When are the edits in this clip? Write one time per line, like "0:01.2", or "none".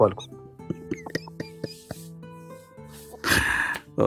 none